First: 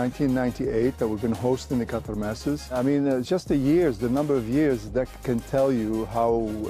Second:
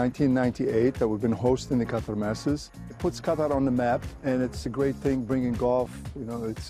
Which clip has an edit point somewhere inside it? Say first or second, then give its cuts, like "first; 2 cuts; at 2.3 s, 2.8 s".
second; 2 cuts; at 2.8 s, 4.5 s